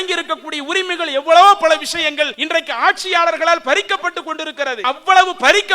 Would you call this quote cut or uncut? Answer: cut